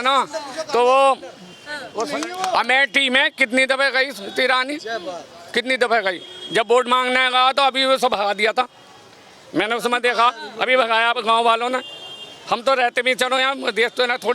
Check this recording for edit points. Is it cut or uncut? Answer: cut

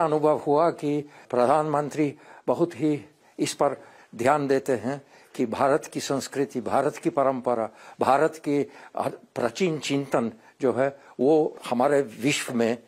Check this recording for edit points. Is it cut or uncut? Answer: cut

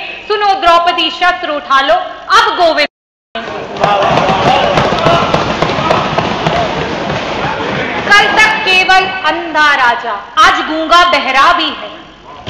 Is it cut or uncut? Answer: uncut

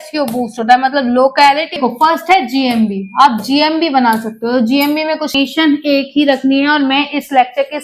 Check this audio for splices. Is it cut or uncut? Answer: cut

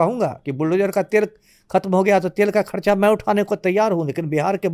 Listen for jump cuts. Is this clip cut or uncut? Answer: uncut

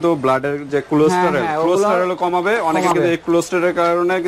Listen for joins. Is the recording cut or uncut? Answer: uncut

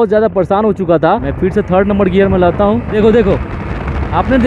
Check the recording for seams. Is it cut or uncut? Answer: cut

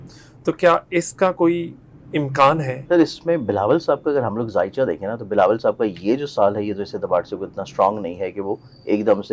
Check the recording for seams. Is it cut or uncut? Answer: cut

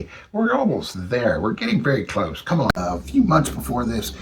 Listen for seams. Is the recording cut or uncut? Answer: cut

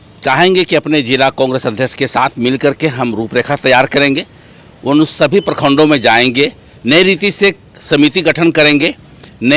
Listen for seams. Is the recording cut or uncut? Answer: uncut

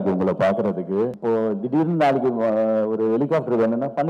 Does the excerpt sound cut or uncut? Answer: cut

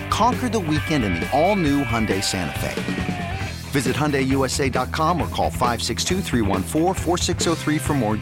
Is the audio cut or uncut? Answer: uncut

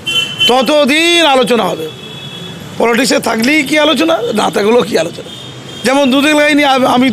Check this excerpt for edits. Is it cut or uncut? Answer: uncut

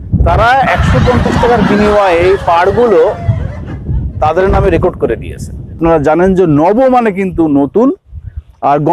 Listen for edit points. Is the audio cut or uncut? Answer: cut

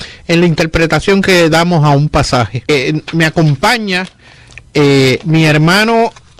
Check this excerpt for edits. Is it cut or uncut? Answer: cut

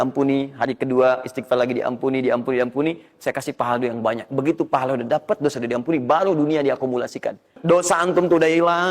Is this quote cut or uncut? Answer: cut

